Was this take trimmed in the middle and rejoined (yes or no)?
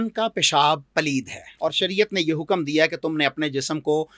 yes